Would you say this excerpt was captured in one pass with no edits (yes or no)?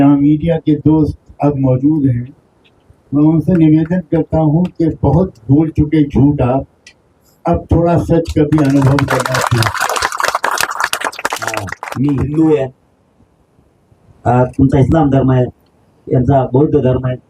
no